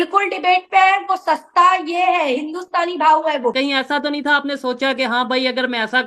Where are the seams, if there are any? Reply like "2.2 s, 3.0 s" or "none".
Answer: 3.5 s